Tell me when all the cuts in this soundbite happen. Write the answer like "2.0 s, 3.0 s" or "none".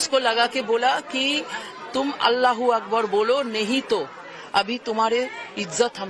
none